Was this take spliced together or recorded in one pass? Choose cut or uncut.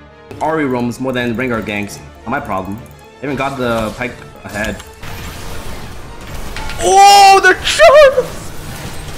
cut